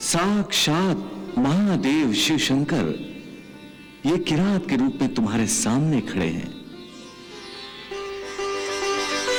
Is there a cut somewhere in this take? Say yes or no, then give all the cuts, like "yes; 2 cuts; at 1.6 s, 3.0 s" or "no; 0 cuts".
no; 0 cuts